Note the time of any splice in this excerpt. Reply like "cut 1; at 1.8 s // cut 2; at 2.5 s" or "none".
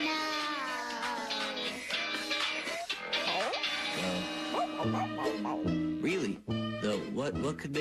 cut 1; at 3.6 s